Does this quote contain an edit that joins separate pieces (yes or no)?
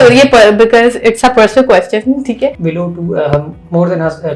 yes